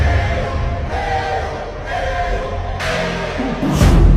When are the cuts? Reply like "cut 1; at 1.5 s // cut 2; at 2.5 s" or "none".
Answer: none